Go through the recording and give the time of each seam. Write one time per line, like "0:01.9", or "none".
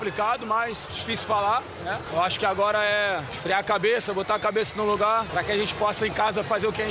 0:00.9
0:02.1
0:03.3
0:05.3